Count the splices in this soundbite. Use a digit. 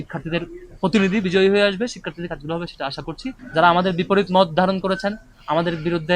1